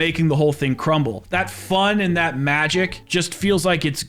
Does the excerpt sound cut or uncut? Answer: cut